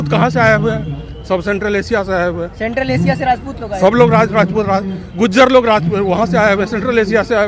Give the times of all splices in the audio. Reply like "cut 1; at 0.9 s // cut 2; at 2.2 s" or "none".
none